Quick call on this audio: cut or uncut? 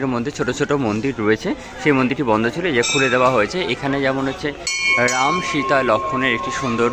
uncut